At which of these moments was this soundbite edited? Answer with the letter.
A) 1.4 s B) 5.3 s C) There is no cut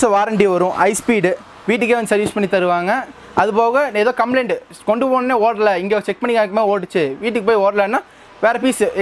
C